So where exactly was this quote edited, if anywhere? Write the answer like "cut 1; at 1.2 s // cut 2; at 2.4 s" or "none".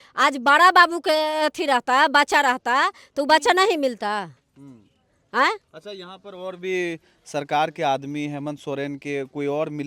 none